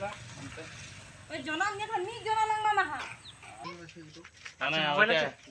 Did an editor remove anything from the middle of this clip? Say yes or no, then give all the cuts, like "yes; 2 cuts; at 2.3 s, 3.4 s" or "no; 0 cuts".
yes; 1 cut; at 4.0 s